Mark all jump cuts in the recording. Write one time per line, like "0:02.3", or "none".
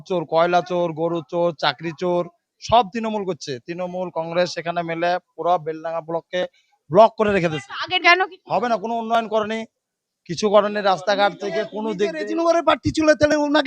0:03.6
0:07.9